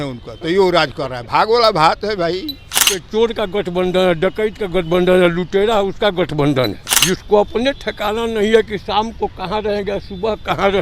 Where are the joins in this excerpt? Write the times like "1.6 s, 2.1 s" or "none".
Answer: 2.9 s, 6.9 s